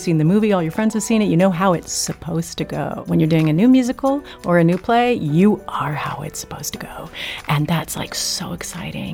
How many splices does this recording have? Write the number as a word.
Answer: one